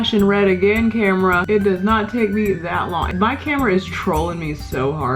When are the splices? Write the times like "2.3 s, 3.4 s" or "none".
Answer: 1.4 s, 3.1 s